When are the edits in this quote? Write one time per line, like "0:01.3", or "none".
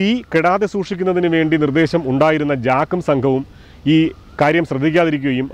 none